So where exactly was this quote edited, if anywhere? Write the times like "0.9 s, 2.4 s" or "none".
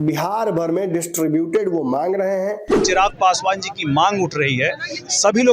2.8 s

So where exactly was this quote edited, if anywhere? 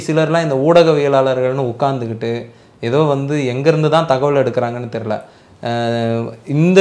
none

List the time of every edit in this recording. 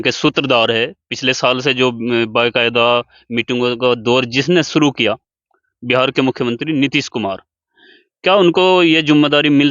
none

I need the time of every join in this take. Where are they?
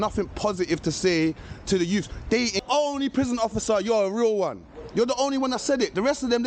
2.6 s

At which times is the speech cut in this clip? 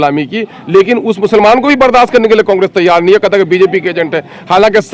none

